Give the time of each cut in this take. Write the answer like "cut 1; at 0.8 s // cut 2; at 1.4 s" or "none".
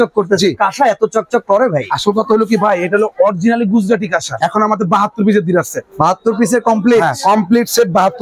cut 1; at 4.3 s